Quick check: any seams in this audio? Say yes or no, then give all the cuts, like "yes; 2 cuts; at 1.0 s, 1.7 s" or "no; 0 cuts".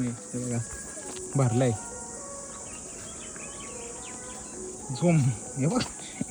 no; 0 cuts